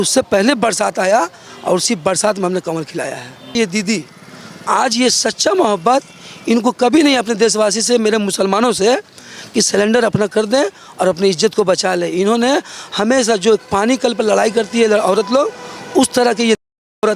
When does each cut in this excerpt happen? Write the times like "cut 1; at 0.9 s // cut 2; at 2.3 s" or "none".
cut 1; at 3.6 s

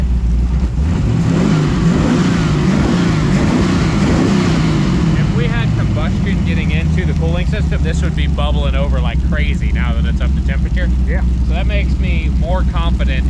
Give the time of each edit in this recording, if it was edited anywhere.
none

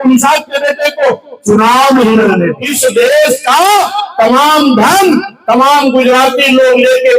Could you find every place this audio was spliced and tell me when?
cut 1; at 2.7 s

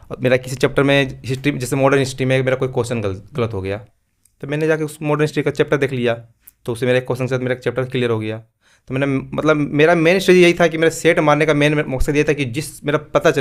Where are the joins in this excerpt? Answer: none

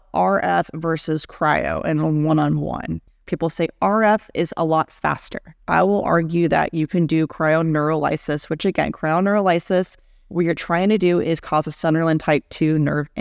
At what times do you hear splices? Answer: cut 1; at 3.2 s // cut 2; at 5.5 s

